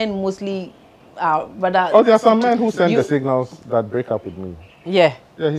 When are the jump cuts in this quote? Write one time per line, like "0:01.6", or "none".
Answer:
none

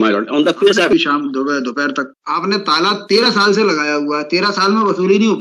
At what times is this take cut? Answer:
0:00.9
0:02.1

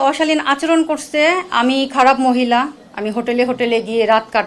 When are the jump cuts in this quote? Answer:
none

